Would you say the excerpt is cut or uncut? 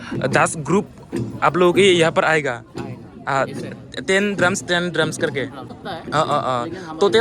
cut